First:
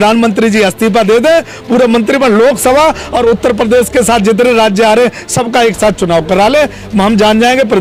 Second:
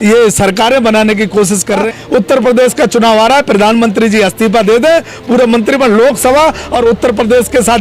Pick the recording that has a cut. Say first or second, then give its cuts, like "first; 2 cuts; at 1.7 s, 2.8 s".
second; 1 cut; at 1.8 s